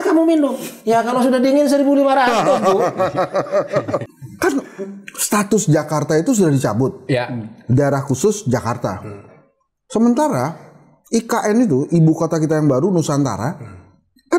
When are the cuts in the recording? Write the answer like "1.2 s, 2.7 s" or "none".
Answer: 4.0 s